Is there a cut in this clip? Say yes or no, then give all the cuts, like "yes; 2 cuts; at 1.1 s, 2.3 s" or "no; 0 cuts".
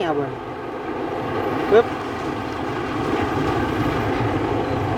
no; 0 cuts